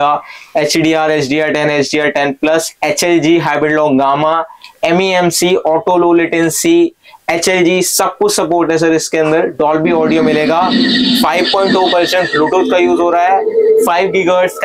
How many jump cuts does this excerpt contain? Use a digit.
0